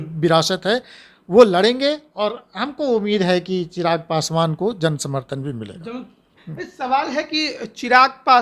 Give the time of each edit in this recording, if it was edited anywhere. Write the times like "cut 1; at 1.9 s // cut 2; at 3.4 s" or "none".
none